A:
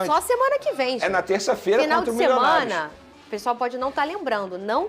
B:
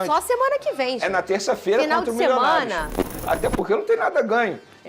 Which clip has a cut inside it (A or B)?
B